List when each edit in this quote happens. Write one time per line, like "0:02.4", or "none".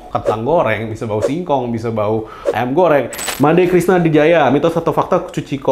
0:03.2

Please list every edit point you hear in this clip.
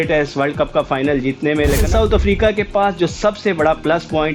0:01.6

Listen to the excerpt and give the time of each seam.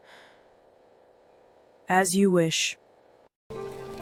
none

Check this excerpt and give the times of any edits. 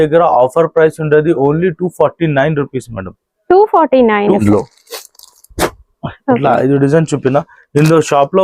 0:04.4

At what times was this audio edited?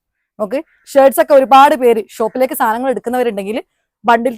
none

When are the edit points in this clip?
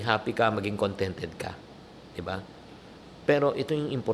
none

